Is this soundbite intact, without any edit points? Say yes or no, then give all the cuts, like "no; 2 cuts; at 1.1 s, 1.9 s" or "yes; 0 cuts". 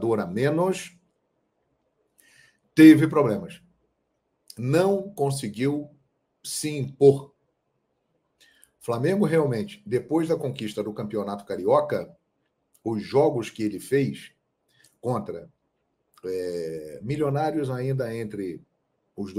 yes; 0 cuts